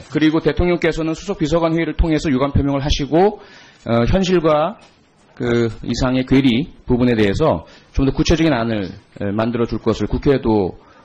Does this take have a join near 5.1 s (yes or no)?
yes